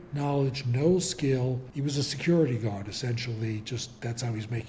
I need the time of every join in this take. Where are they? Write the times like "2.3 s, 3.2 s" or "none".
1.7 s